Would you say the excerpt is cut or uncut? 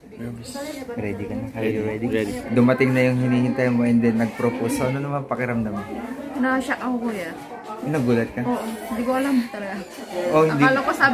cut